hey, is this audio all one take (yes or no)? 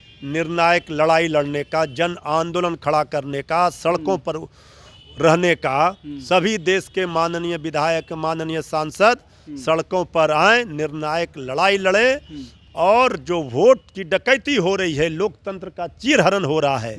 yes